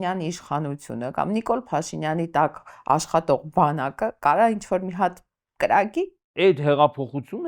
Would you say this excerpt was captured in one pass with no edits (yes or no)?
no